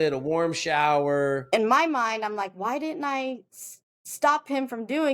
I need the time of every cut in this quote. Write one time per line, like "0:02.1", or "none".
0:01.4